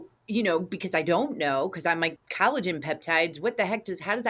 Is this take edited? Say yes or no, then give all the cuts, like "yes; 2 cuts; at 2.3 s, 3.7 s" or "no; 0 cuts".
yes; 1 cut; at 2.2 s